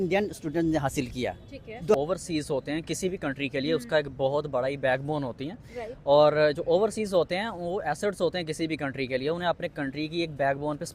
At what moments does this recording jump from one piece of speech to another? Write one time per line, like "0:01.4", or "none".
0:01.9